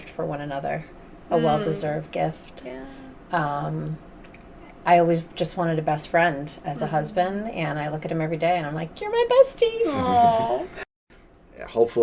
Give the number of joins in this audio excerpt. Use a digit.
1